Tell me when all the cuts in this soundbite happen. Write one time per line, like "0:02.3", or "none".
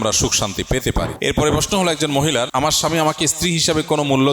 0:01.1
0:02.5